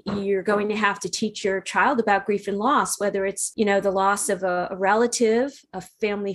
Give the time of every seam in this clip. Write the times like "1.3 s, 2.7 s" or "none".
3.4 s